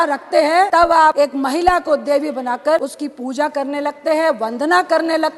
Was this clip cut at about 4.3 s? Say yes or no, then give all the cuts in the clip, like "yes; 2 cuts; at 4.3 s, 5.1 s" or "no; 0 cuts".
no; 2 cuts; at 0.9 s, 2.9 s